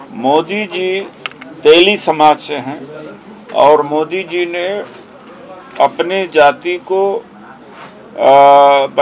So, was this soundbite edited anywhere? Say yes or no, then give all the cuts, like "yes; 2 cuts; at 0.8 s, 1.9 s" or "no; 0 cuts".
no; 0 cuts